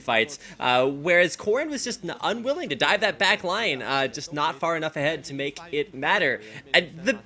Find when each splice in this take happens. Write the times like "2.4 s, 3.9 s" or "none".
5.1 s